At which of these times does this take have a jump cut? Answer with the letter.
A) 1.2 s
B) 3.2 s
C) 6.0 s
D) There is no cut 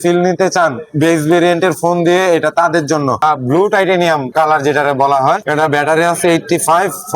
B